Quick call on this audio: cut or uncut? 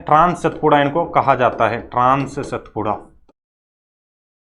uncut